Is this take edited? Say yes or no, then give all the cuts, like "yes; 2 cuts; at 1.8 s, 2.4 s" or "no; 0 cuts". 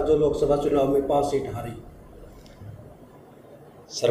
no; 0 cuts